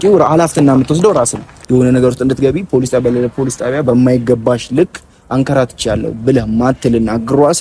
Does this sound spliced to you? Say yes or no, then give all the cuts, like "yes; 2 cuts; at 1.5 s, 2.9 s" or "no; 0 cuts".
yes; 1 cut; at 1.5 s